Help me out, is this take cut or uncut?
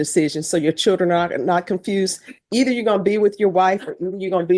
uncut